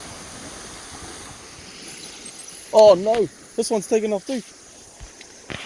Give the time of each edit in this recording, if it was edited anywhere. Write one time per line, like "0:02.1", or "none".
0:01.6